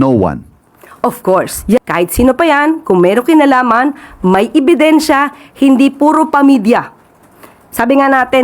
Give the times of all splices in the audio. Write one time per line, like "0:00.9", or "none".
0:01.8

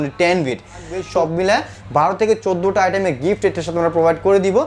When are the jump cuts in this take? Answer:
0:01.0

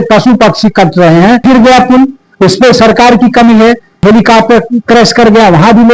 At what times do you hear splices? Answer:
0:01.4
0:03.9

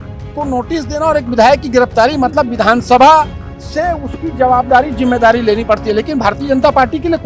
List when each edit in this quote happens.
none

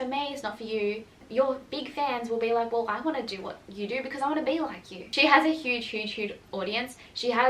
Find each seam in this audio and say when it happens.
0:01.2
0:05.0

